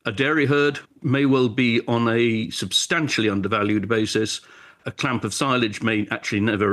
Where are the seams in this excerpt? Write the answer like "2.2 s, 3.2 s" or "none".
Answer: 1.0 s, 4.8 s